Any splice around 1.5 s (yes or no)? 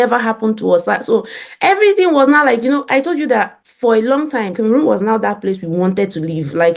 no